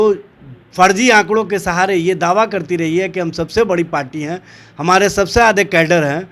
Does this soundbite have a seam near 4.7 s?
no; 0 cuts

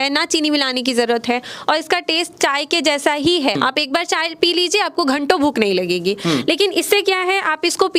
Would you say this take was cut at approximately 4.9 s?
no; 1 cut; at 3.6 s

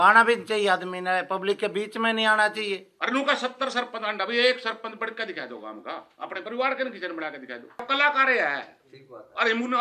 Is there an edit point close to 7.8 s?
yes; 2 cuts; at 2.9 s, 7.8 s

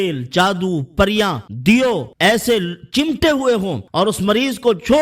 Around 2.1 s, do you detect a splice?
yes; 3 cuts; at 1.5 s, 2.1 s, 3.8 s

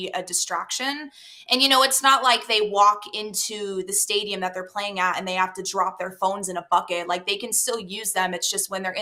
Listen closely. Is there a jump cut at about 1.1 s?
no; 0 cuts

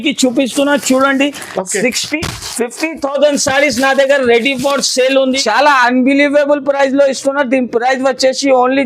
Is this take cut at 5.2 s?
yes; 1 cut; at 5.2 s

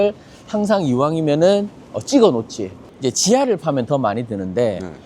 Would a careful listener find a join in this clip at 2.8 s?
yes; 1 cut; at 2.8 s

